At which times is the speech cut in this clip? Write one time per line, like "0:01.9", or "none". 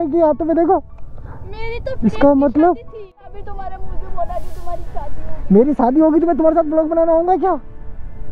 0:03.1